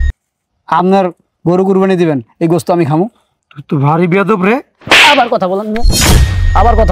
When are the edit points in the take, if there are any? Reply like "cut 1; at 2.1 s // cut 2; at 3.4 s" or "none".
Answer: cut 1; at 3.4 s